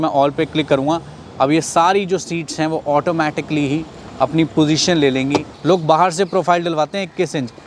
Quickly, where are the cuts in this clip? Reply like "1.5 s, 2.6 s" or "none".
5.5 s